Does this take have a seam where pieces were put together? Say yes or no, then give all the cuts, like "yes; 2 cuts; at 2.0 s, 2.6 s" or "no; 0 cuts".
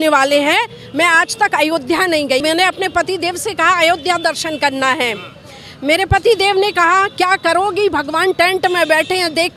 yes; 1 cut; at 2.4 s